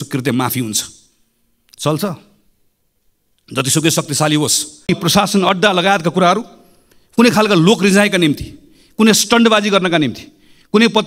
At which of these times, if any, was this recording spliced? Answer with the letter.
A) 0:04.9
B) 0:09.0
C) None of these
A